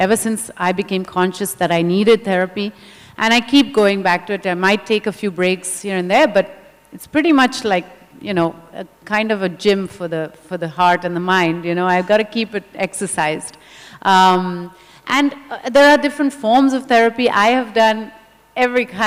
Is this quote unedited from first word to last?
yes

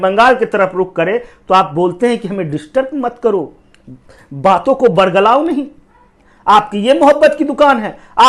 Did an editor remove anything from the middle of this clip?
no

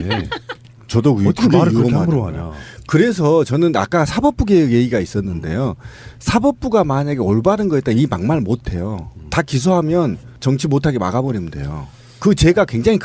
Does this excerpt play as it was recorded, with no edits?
yes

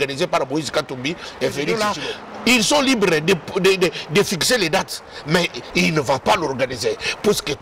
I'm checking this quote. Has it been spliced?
yes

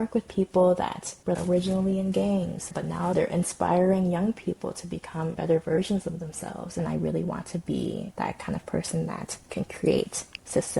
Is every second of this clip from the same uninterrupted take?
no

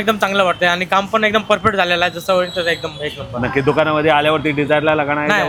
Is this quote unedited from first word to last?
yes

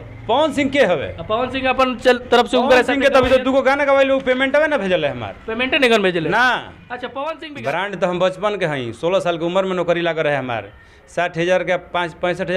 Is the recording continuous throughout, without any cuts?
no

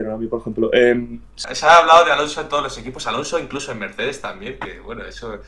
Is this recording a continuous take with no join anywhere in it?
no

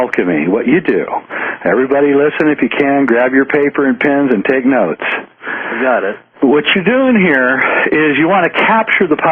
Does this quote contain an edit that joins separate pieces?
yes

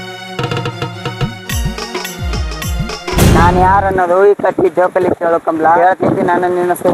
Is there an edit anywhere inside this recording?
yes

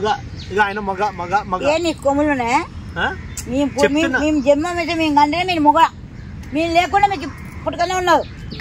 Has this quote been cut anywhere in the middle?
no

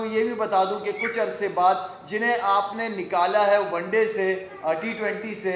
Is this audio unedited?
yes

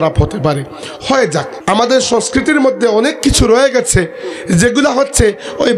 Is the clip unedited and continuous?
no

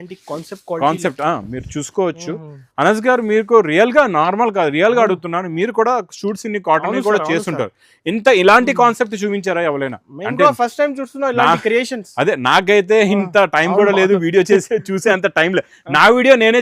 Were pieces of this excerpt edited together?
no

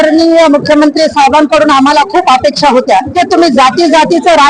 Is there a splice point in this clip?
yes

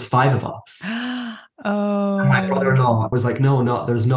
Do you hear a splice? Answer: yes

